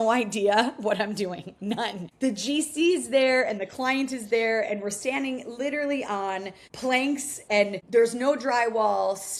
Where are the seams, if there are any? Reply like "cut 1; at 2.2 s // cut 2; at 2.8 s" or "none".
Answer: none